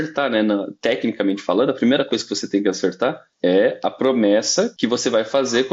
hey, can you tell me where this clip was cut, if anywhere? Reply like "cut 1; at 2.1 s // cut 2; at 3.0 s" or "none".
cut 1; at 3.3 s // cut 2; at 4.7 s